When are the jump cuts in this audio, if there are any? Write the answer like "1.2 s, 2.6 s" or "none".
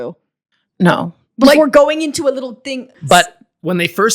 2.9 s